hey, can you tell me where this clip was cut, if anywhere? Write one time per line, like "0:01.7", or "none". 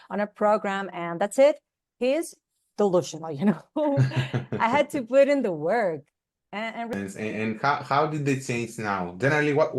0:06.9